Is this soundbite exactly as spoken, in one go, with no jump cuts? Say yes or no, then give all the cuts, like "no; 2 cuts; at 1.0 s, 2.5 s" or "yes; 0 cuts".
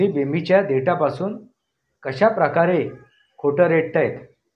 yes; 0 cuts